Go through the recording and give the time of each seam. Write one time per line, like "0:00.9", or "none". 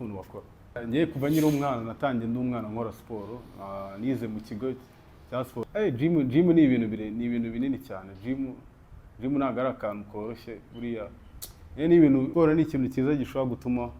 0:00.8
0:05.6
0:12.3